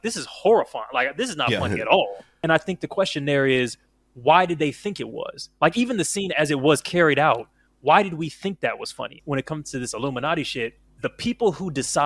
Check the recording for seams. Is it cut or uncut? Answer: cut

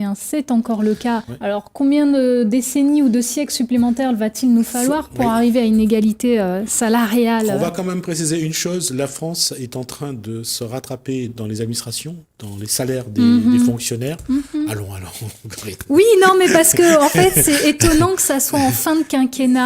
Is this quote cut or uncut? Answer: cut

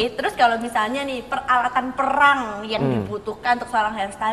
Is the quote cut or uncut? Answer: uncut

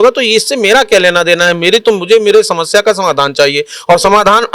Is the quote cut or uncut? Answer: uncut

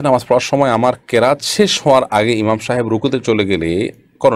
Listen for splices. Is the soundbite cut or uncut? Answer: uncut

